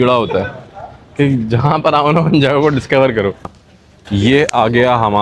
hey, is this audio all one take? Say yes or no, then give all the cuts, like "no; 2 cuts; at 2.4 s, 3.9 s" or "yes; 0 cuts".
no; 1 cut; at 3.8 s